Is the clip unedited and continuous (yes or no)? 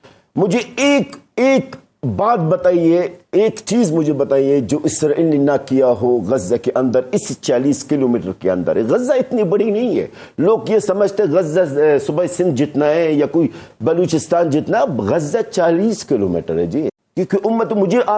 no